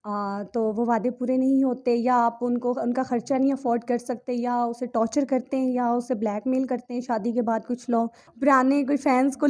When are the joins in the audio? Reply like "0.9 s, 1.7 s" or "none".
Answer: 8.2 s